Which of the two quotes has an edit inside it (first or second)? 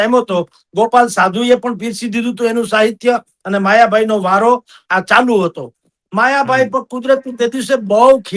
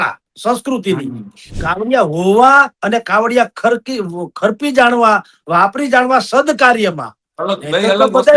second